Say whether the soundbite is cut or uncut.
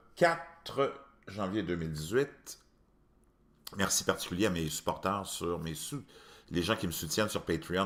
uncut